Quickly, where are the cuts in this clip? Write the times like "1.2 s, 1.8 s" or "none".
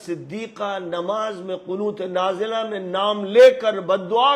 none